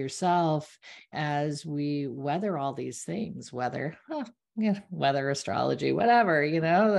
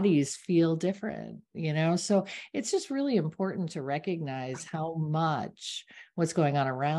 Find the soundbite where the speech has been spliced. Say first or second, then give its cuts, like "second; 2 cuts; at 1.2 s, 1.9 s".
first; 1 cut; at 1.1 s